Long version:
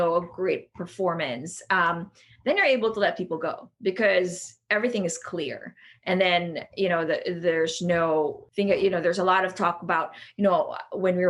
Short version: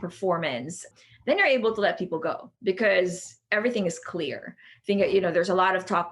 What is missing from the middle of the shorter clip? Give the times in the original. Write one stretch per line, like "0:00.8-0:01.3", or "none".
0:01.6-0:02.0
0:05.9-0:08.4